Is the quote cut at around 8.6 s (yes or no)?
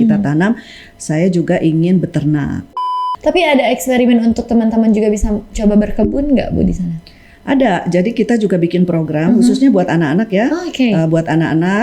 no